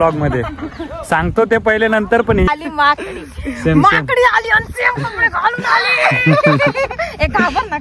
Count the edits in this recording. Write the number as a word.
one